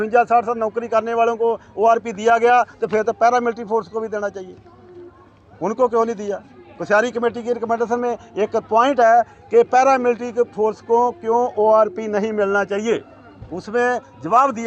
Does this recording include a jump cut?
no; 0 cuts

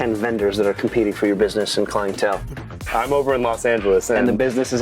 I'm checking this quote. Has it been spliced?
yes; 1 cut; at 2.6 s

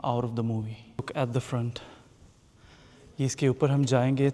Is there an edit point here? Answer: yes; 1 cut; at 1.1 s

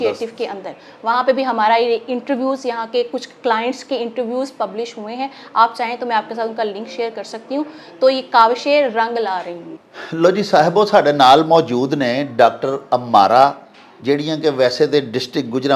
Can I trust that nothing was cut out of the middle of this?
yes; 0 cuts

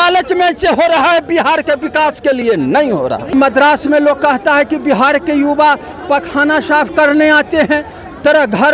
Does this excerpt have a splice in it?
yes; 1 cut; at 3.3 s

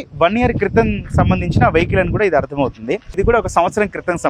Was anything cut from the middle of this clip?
yes; 1 cut; at 3.2 s

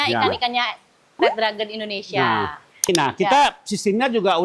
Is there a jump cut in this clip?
yes; 1 cut; at 2.8 s

